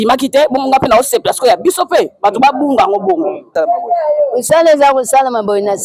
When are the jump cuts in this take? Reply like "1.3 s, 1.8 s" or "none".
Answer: 3.5 s